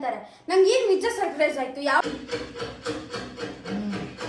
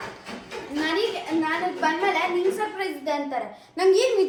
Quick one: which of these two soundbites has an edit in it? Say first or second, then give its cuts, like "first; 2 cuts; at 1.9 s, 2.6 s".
first; 1 cut; at 2.0 s